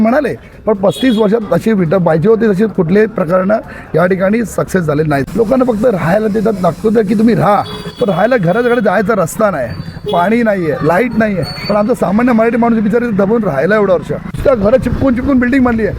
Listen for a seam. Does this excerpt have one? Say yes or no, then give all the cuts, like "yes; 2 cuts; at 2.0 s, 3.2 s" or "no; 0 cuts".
yes; 2 cuts; at 5.2 s, 14.4 s